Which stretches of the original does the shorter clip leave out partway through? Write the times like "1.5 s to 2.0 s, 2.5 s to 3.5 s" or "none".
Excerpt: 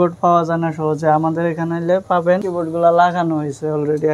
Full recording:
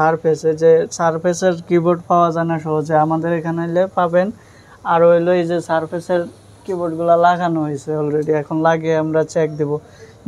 4.3 s to 6.7 s